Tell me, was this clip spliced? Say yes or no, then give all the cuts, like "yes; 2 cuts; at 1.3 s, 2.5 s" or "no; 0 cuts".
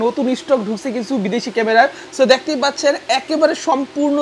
no; 0 cuts